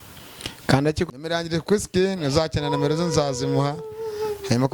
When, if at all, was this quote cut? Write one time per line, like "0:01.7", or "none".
0:01.1